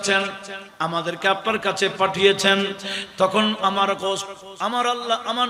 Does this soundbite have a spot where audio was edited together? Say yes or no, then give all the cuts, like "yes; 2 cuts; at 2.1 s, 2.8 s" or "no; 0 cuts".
no; 0 cuts